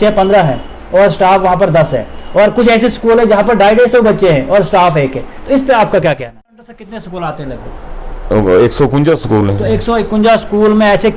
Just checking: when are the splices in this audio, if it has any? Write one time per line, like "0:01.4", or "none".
0:06.8